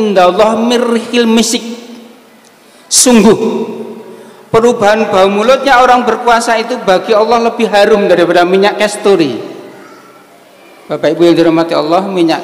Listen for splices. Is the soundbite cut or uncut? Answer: uncut